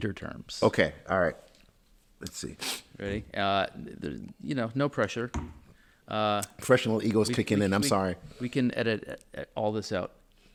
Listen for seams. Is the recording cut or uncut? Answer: uncut